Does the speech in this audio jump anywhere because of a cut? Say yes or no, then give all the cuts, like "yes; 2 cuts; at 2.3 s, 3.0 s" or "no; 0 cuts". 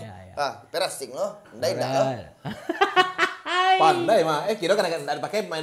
no; 0 cuts